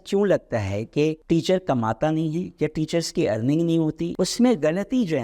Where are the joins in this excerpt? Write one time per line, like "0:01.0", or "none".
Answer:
none